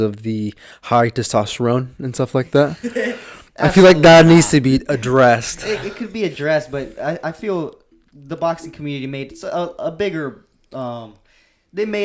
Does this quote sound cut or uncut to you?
uncut